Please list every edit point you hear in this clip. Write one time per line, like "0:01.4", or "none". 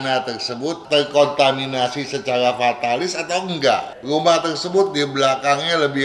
0:03.9